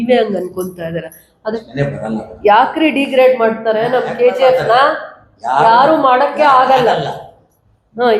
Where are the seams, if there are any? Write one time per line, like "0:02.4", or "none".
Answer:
0:01.6